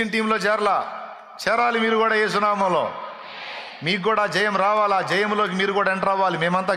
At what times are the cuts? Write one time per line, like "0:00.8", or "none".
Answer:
none